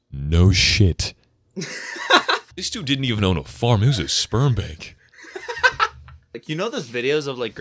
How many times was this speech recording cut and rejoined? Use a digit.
2